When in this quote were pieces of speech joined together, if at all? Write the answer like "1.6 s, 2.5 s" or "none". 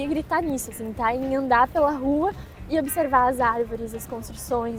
none